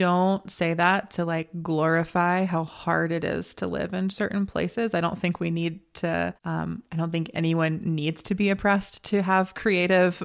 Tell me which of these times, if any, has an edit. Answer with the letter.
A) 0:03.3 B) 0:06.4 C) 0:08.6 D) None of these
B